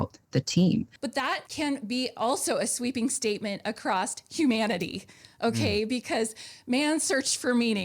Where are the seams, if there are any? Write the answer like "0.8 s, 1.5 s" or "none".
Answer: 1.0 s